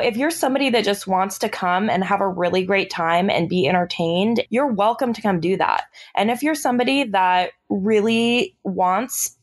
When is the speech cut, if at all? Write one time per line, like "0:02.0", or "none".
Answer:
0:04.4